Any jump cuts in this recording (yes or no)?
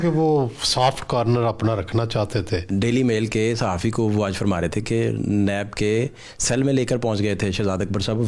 yes